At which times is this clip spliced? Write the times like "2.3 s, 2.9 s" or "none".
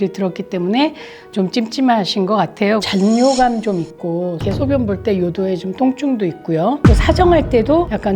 2.8 s, 4.4 s